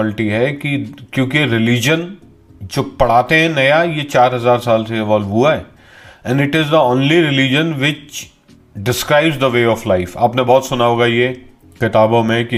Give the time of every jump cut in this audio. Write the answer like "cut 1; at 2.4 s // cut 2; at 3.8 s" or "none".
none